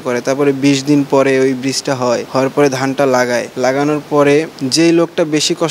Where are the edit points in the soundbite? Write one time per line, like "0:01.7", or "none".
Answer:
0:02.3
0:03.5
0:04.6